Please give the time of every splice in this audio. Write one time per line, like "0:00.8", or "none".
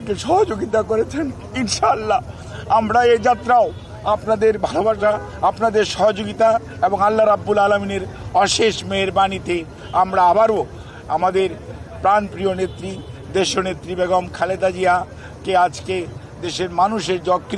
none